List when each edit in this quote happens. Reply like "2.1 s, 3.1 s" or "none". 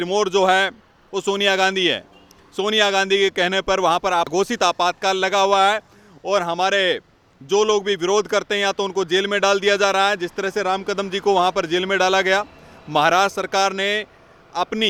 none